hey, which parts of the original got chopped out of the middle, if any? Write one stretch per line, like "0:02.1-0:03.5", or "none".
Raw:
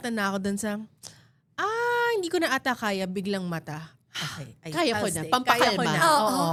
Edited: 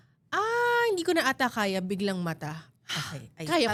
none